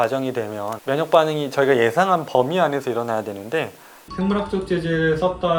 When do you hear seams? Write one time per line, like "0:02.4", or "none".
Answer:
none